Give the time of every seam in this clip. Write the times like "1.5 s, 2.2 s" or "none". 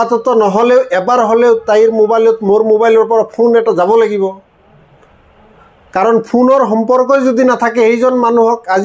none